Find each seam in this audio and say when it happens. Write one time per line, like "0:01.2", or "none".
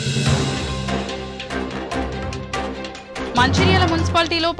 0:02.7